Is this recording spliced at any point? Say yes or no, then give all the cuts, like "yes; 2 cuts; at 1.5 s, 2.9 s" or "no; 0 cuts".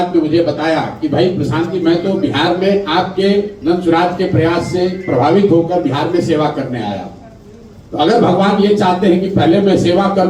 no; 0 cuts